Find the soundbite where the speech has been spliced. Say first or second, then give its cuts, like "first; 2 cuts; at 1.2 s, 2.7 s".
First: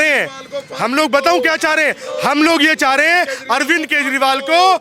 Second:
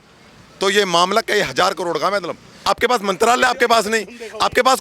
second; 1 cut; at 2.6 s